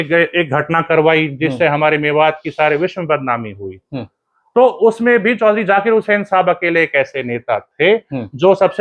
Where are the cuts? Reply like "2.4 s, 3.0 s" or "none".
none